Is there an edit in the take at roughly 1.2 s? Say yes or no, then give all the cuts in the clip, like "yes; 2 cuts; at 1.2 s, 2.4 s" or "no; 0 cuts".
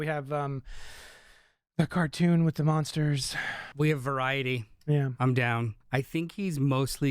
no; 2 cuts; at 3.7 s, 5.8 s